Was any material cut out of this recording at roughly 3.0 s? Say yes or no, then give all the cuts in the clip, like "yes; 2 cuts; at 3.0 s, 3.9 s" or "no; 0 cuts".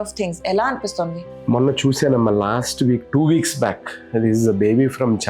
no; 1 cut; at 1.3 s